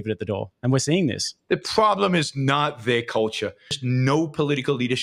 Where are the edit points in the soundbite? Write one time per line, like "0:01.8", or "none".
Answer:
0:03.7